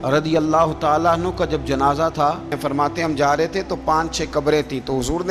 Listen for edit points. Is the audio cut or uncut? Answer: cut